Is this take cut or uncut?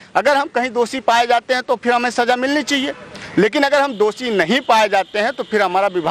uncut